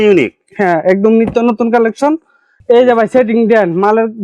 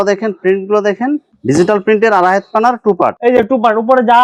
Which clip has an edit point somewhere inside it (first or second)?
first